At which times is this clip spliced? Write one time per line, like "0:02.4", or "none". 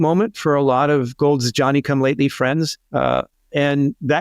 0:02.8